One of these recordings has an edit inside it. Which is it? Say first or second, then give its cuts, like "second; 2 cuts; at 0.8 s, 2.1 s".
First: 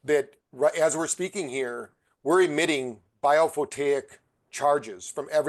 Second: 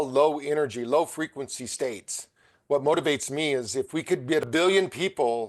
second; 1 cut; at 4.4 s